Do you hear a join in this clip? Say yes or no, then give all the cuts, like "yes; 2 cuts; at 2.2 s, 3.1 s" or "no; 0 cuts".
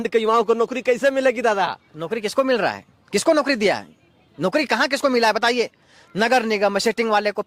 no; 0 cuts